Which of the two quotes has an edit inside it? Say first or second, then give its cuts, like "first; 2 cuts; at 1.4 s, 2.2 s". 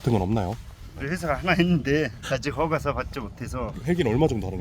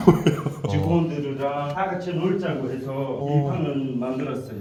first; 2 cuts; at 1.0 s, 3.7 s